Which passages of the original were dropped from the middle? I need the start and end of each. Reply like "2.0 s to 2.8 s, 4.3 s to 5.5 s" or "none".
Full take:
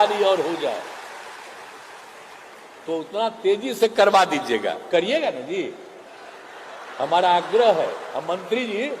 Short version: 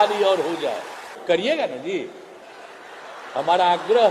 1.2 s to 4.8 s

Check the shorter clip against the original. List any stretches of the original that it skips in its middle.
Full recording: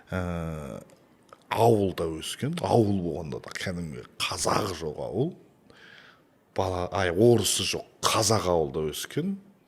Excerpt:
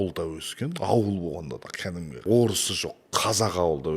4.0 s to 7.1 s

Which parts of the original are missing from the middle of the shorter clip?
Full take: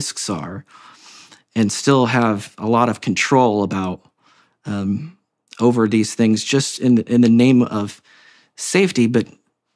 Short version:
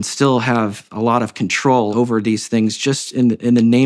3.6 s to 5.6 s

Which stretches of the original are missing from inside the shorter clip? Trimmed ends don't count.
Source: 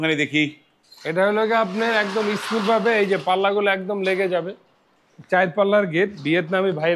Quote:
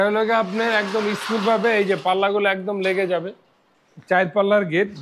none

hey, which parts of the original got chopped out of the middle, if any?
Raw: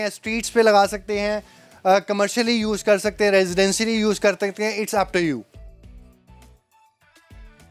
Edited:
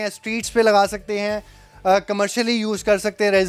none

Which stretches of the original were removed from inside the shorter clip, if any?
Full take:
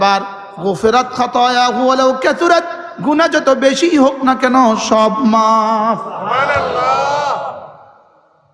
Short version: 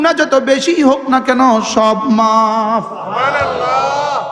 none

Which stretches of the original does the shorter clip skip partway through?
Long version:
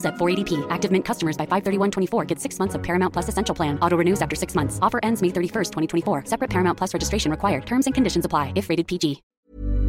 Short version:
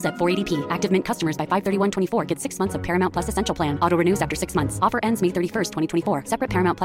none

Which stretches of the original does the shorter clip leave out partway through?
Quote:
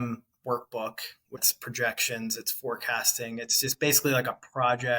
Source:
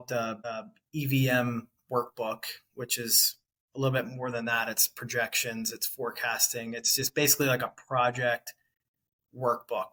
2.9 s to 4.8 s

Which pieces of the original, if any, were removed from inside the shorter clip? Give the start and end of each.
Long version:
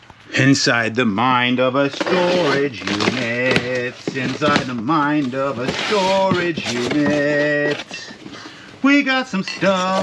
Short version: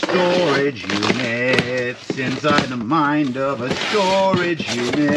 none

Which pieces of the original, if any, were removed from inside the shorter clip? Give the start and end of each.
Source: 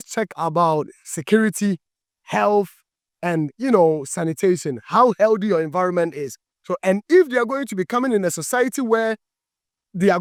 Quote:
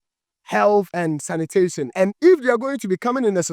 3.2 s to 6.2 s

